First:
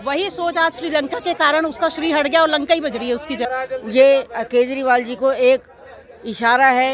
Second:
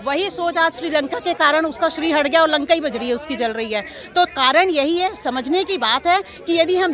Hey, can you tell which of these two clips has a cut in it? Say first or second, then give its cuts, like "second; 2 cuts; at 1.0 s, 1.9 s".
first; 1 cut; at 3.4 s